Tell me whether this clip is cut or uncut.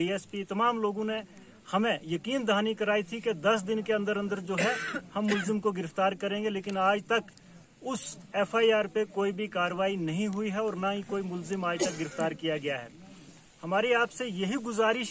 cut